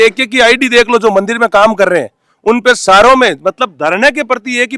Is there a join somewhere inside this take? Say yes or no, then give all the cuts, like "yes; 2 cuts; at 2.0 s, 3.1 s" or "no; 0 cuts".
no; 0 cuts